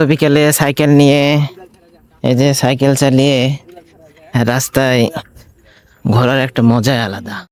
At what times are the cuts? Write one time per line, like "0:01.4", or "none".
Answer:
none